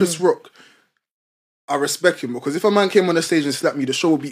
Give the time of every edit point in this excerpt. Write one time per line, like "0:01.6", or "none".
none

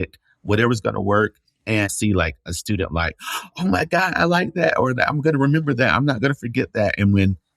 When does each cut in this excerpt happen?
0:01.7

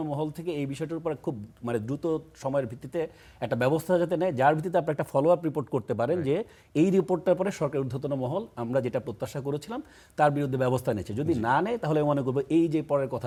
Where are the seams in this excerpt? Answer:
none

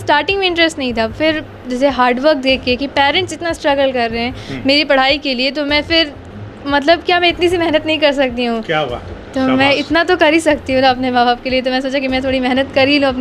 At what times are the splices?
none

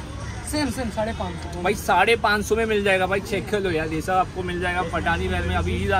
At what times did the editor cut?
none

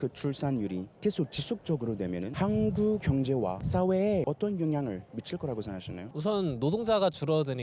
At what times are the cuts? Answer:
0:02.3
0:03.3
0:04.2
0:06.0

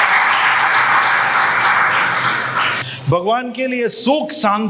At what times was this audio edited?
0:02.9

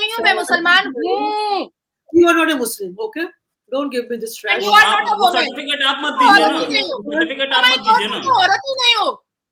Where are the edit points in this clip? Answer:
none

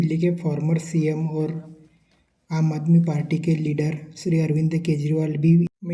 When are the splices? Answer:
none

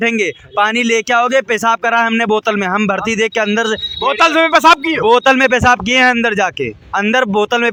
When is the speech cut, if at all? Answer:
none

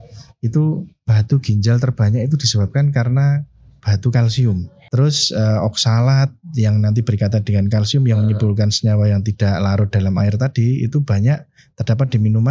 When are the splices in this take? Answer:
0:04.8

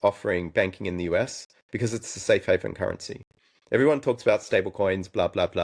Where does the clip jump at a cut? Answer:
none

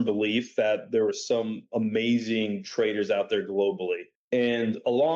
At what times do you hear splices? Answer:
0:04.1

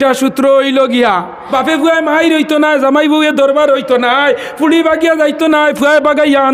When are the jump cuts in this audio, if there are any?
0:01.4

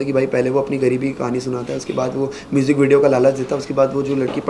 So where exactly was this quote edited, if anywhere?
none

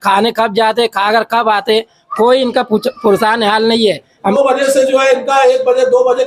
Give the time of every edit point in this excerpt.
0:04.3

